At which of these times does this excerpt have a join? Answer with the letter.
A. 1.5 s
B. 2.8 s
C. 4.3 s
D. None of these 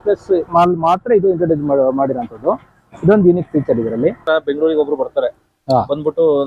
C